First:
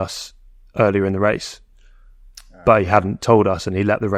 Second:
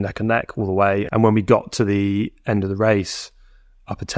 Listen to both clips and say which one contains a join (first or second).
second